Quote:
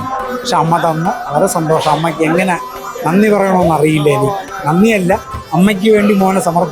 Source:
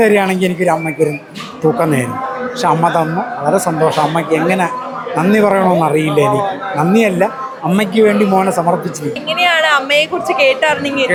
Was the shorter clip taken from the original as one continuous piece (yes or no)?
yes